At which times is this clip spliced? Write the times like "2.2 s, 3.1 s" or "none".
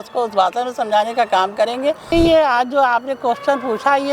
2.1 s